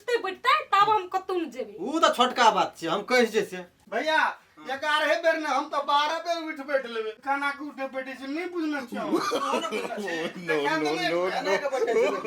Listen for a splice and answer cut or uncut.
cut